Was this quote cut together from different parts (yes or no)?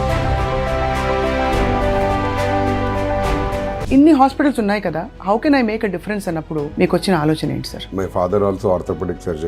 yes